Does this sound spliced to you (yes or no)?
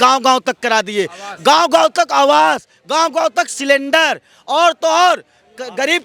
no